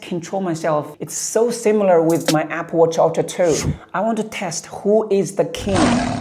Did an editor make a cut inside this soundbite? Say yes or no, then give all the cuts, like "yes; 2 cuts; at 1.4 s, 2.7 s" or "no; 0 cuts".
yes; 1 cut; at 0.9 s